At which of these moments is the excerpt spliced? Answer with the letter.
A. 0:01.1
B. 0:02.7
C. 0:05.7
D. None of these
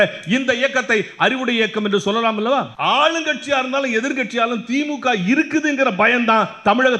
B